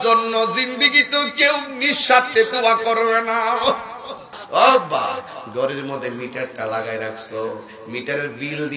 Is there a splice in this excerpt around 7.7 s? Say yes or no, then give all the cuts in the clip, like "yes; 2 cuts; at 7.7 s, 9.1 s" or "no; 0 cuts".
no; 1 cut; at 4.3 s